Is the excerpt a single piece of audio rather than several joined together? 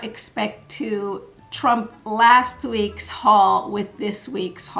yes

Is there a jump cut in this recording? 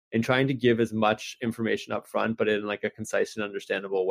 no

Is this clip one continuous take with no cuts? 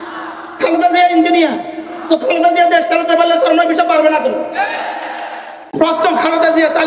no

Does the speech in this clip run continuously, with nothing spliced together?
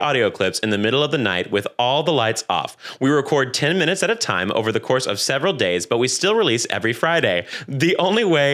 no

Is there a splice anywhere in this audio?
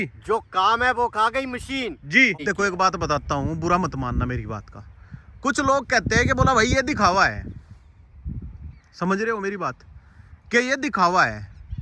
yes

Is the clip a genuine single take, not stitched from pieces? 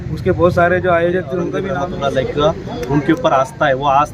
no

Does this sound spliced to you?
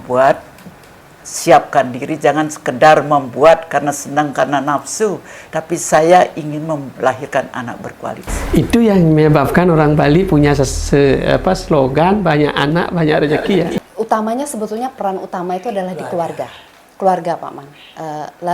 yes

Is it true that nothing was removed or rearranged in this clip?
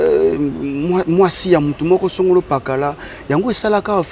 yes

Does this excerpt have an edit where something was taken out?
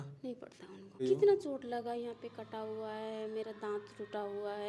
yes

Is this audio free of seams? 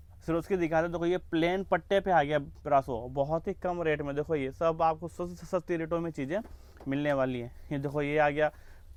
yes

